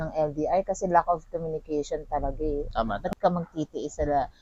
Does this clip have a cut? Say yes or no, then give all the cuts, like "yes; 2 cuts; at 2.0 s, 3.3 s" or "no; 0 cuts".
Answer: yes; 1 cut; at 3.0 s